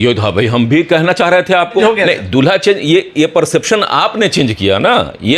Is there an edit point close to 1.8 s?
yes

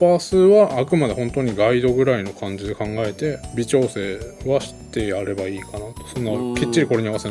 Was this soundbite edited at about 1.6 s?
no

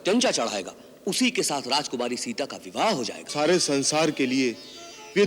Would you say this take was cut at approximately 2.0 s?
no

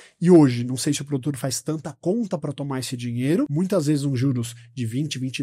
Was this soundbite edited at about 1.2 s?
no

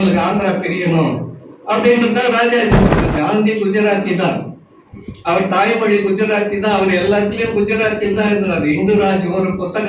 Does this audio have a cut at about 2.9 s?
yes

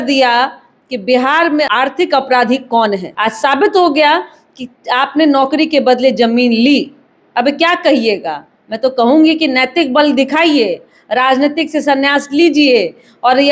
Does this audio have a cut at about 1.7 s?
yes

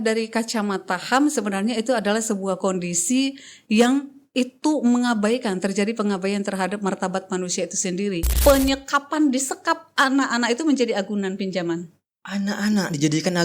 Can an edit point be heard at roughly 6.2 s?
no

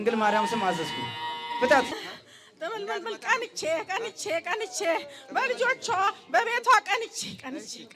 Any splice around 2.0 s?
yes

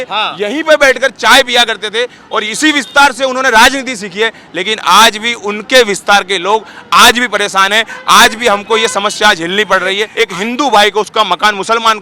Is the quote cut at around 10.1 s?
yes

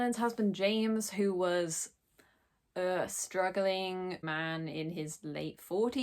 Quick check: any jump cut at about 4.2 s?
yes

